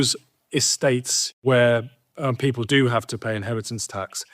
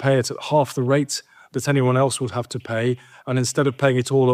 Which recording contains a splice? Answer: first; 1 cut; at 1.2 s

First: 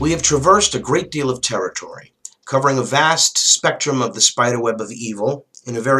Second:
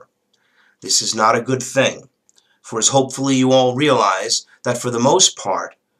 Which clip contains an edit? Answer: first; 1 cut; at 3.8 s

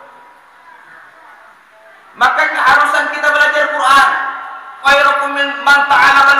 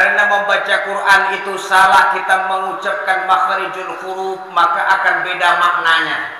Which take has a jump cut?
first; 1 cut; at 4.7 s

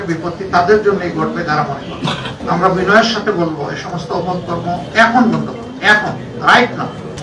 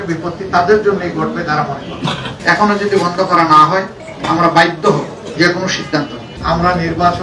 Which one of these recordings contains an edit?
second; 2 cuts; at 2.3 s, 6.3 s

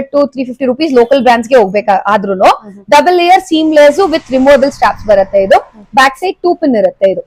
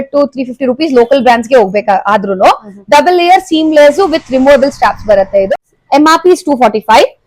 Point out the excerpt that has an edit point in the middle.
second; 1 cut; at 5.5 s

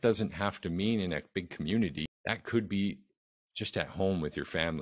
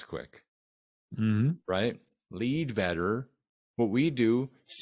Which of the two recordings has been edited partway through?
first; 1 cut; at 2.0 s

